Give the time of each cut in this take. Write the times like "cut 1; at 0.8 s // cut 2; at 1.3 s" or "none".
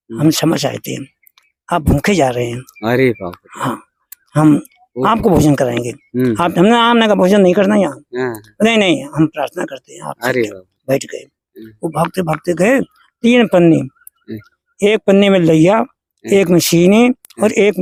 none